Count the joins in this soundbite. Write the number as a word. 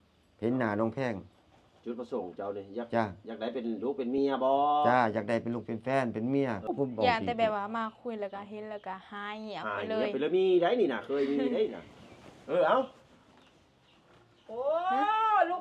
one